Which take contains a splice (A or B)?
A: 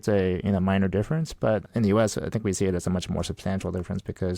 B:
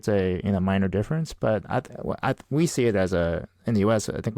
A